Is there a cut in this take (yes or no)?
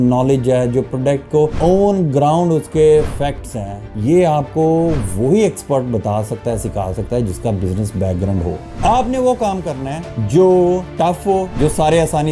yes